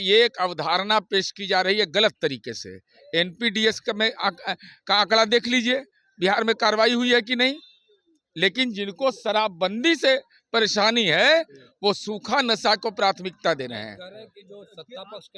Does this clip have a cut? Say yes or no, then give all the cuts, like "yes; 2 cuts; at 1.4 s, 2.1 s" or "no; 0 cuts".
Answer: no; 0 cuts